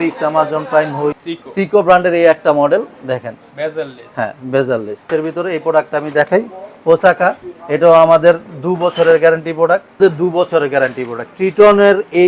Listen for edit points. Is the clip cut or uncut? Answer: cut